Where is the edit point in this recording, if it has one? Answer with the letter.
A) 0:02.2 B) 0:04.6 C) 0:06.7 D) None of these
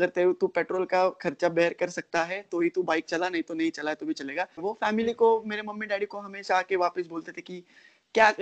B